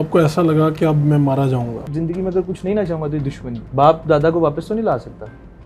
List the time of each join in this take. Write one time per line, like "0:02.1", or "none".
0:01.9
0:03.5